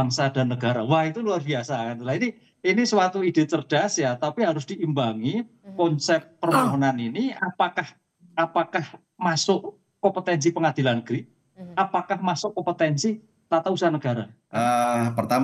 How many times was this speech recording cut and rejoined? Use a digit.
1